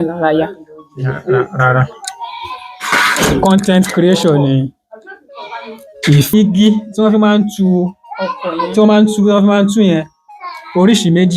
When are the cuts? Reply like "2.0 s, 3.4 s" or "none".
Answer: 6.3 s